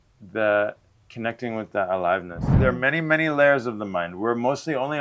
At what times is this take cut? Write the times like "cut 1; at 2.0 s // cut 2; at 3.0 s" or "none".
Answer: cut 1; at 2.6 s